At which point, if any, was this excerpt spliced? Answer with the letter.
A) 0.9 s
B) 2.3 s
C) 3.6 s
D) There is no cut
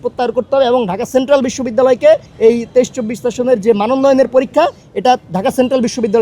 B